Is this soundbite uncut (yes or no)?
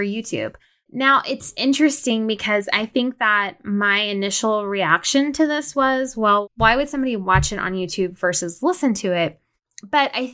yes